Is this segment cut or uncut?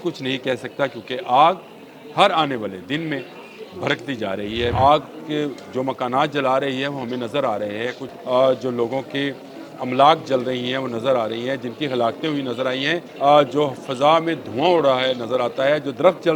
cut